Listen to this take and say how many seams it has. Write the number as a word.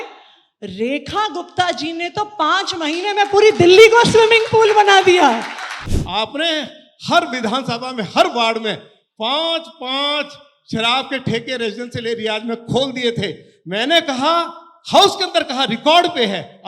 one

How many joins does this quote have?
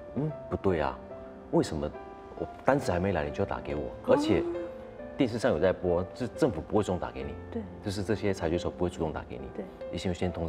zero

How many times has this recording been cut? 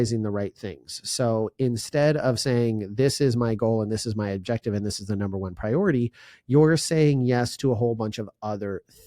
zero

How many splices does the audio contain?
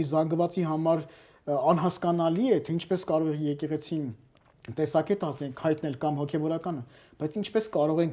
zero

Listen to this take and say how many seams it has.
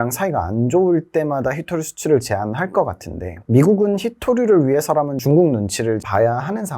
one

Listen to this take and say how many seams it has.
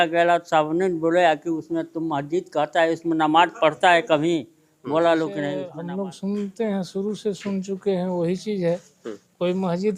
one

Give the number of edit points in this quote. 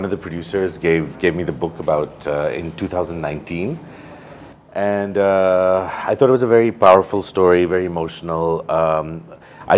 zero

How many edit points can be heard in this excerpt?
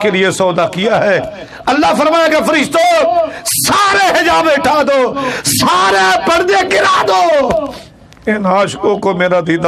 zero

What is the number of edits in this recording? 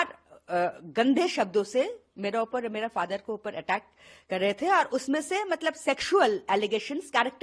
zero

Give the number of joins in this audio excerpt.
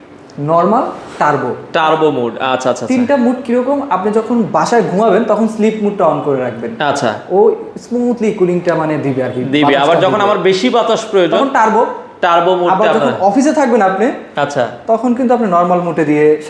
zero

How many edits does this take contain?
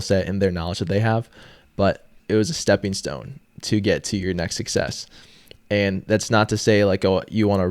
one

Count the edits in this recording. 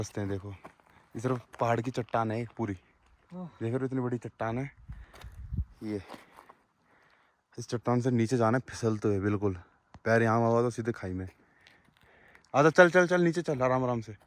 zero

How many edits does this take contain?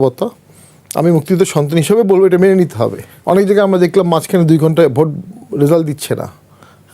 one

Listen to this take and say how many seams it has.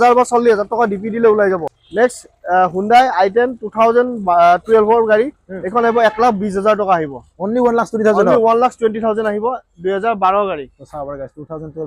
one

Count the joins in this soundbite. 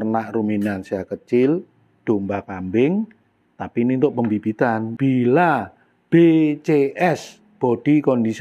one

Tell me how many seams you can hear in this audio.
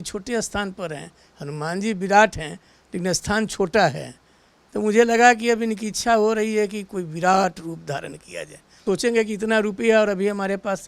one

